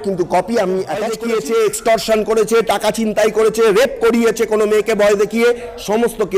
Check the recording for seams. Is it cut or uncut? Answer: cut